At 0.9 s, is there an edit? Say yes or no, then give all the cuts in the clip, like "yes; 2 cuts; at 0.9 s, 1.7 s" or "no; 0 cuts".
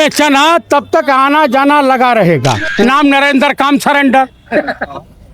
no; 1 cut; at 2.6 s